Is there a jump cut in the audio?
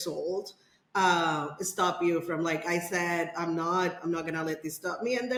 no; 0 cuts

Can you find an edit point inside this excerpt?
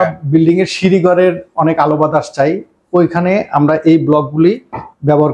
no; 0 cuts

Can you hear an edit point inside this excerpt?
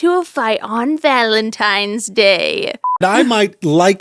yes; 1 cut; at 2.9 s

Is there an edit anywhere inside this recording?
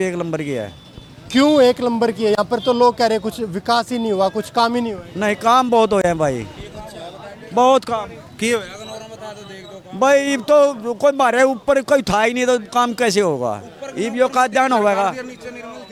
no; 0 cuts

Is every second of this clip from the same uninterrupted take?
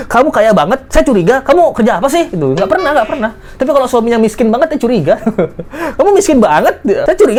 yes; 0 cuts

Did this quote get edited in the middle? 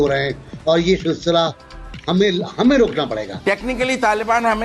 yes; 1 cut; at 3.3 s

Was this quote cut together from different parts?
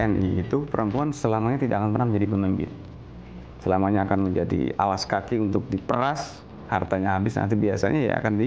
no; 0 cuts

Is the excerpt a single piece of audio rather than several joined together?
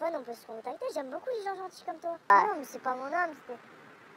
no; 1 cut; at 2.3 s

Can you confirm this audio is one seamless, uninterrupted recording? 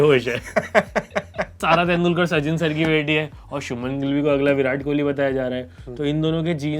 no; 1 cut; at 1.6 s

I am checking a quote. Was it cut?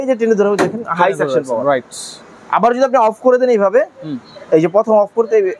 no; 0 cuts

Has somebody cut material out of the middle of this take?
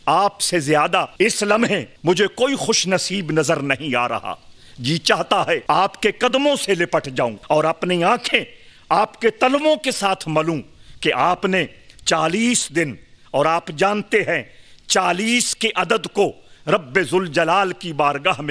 yes; 3 cuts; at 1.4 s, 5.6 s, 7.4 s

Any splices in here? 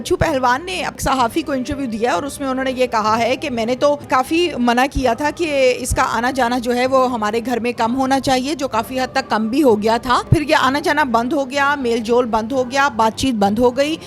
yes; 3 cuts; at 0.9 s, 4.1 s, 10.3 s

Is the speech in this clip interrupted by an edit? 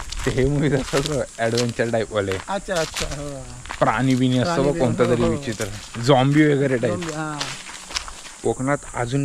yes; 1 cut; at 8.3 s

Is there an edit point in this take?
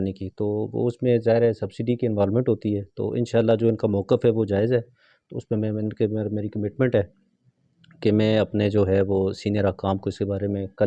no; 0 cuts

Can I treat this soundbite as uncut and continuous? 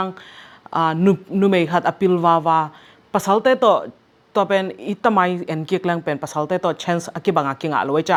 yes; 0 cuts

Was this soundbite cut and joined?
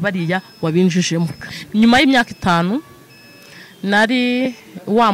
yes; 1 cut; at 1.4 s

